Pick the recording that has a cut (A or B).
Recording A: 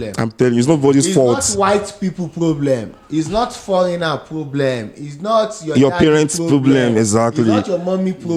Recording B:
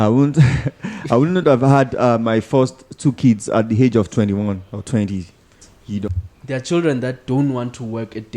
B